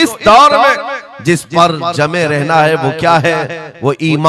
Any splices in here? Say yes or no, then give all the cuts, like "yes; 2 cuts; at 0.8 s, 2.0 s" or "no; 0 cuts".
no; 0 cuts